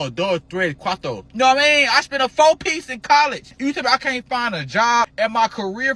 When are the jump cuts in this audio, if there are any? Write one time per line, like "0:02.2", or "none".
0:01.3
0:03.5
0:05.1